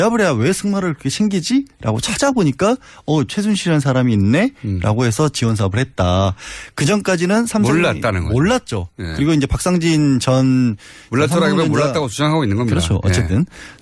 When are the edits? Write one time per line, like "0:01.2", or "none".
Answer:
0:04.2